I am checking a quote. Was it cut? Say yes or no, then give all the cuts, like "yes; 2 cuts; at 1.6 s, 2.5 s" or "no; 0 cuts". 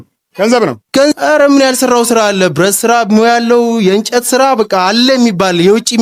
no; 0 cuts